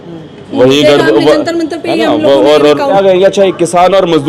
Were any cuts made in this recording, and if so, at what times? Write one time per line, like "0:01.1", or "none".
0:02.9